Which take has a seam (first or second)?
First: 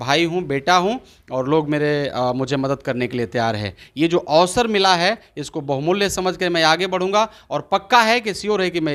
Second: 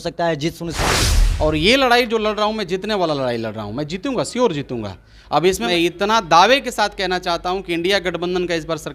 second